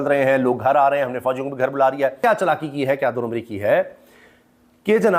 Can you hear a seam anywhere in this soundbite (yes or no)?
no